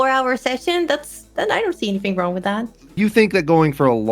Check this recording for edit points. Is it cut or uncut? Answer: cut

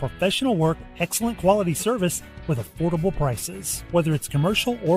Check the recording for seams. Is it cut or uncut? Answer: uncut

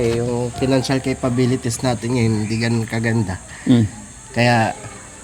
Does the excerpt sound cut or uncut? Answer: uncut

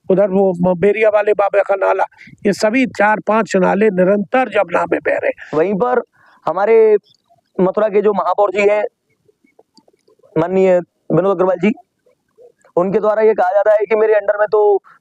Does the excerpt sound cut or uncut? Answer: cut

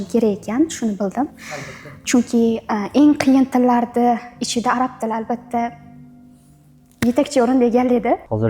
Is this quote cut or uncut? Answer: uncut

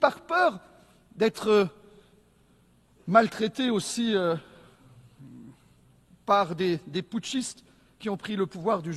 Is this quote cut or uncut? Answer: uncut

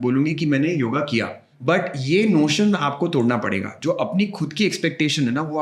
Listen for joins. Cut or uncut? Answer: cut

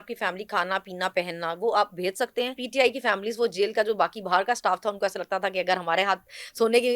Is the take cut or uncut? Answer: cut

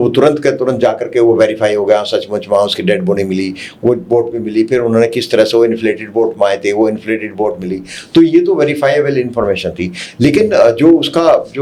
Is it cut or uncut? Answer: uncut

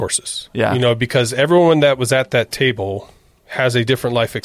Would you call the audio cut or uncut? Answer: uncut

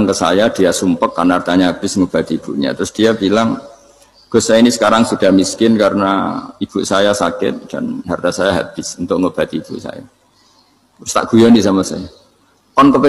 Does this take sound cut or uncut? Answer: uncut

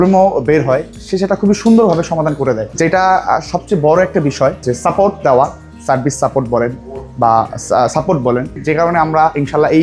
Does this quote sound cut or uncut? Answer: uncut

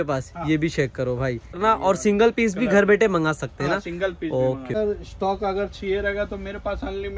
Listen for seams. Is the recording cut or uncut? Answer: cut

